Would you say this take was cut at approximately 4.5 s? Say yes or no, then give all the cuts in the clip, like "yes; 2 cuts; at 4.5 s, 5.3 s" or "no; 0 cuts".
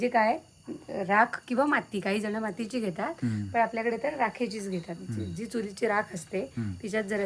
no; 0 cuts